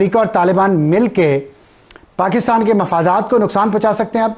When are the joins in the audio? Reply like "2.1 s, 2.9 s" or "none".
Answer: none